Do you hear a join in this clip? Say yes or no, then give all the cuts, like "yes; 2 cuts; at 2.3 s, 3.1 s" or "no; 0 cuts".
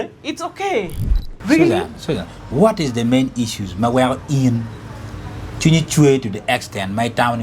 yes; 1 cut; at 1.3 s